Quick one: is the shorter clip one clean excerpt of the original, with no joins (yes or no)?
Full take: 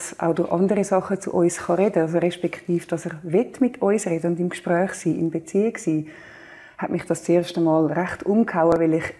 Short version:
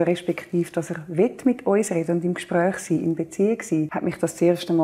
no